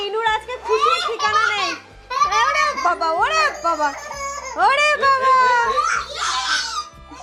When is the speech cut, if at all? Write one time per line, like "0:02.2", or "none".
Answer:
none